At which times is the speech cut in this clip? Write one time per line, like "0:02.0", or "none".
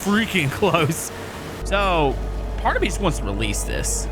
0:01.5